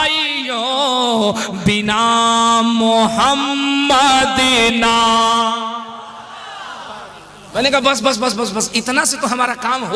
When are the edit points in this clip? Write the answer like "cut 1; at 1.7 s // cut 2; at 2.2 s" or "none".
cut 1; at 7.5 s